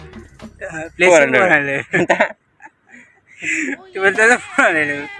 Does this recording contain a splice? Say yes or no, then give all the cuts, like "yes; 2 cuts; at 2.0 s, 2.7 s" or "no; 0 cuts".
no; 0 cuts